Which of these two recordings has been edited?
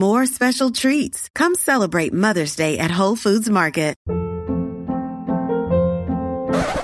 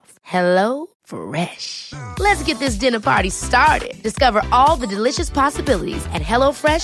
first; 1 cut; at 4.0 s

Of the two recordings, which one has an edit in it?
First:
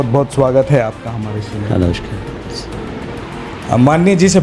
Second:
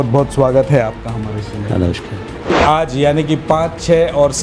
second; 1 cut; at 2.5 s

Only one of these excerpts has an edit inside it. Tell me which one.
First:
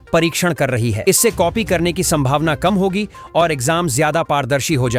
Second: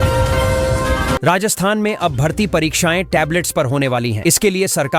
second; 1 cut; at 1.2 s

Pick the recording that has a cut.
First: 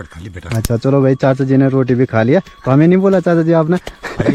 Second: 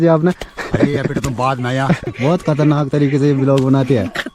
second; 1 cut; at 2.1 s

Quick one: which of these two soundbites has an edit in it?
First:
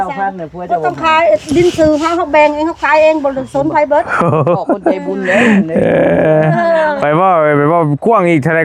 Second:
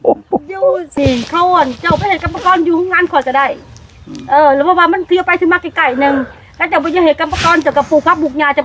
second; 1 cut; at 1.0 s

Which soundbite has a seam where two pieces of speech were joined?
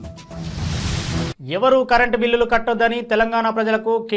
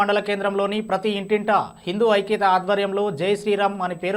first; 1 cut; at 1.3 s

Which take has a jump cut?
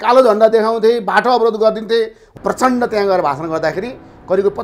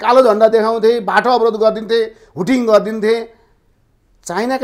first; 1 cut; at 2.2 s

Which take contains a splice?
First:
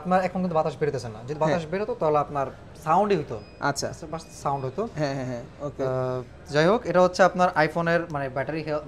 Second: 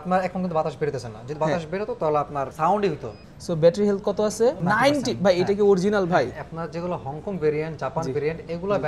second; 3 cuts; at 2.5 s, 3.2 s, 4.6 s

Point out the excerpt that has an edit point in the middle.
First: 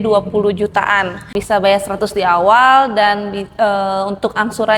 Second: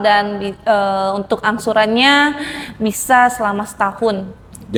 first; 1 cut; at 1.2 s

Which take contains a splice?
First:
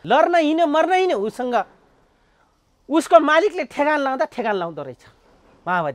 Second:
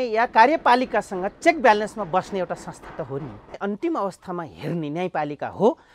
second; 1 cut; at 3.6 s

